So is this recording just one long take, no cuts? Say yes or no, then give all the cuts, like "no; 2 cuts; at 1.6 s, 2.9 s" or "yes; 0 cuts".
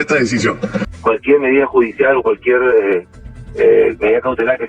no; 1 cut; at 0.9 s